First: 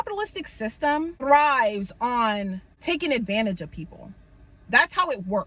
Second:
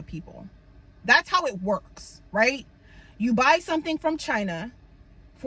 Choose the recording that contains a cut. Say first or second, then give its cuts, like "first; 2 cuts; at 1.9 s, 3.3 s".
first; 2 cuts; at 1.2 s, 2.7 s